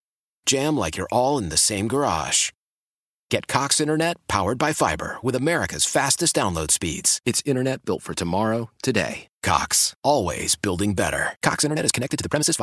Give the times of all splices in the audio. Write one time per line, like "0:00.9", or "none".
none